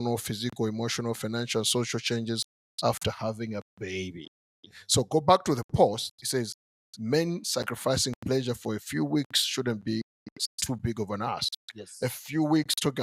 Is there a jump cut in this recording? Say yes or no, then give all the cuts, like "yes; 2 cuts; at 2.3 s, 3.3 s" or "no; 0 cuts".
no; 0 cuts